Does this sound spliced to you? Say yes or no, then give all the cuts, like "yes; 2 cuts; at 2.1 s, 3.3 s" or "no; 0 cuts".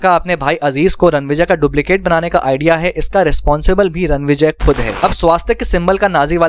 yes; 1 cut; at 4.9 s